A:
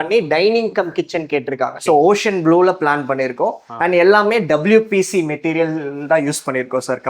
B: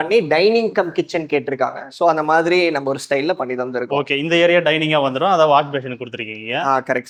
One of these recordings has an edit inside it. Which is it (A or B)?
A